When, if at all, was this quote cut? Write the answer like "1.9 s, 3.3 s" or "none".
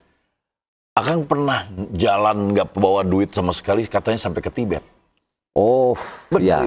none